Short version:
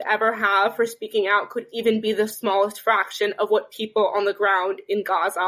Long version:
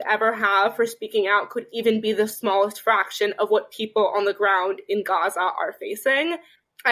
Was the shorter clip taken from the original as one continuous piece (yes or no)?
yes